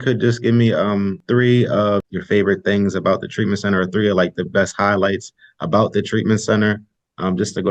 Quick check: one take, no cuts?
no; 2 cuts; at 1.2 s, 2.0 s

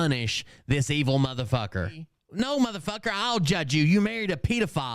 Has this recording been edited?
yes; 1 cut; at 2.2 s

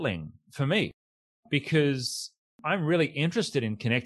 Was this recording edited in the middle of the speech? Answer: yes; 1 cut; at 2.6 s

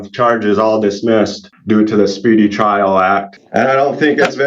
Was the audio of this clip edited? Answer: yes; 2 cuts; at 1.5 s, 3.4 s

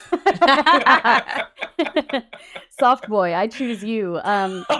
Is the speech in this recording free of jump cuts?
yes; 0 cuts

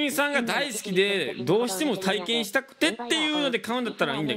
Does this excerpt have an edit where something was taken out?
no; 0 cuts

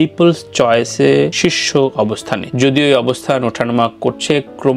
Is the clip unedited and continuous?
yes; 0 cuts

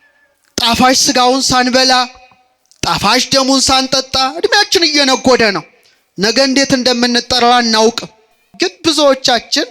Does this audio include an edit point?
yes; 1 cut; at 8.5 s

